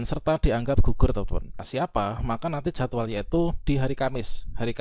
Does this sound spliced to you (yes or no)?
yes